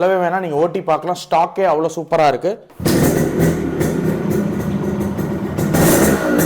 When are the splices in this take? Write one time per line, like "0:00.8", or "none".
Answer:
0:02.7